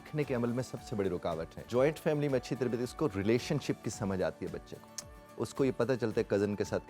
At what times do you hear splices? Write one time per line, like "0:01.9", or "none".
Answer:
0:01.6